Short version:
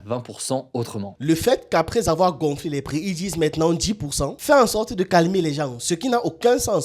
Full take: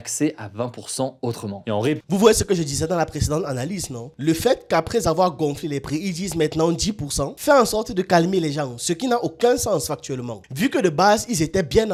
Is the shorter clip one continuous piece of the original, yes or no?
no